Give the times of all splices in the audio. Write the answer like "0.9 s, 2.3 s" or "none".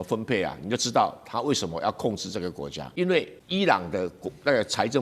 2.8 s, 3.4 s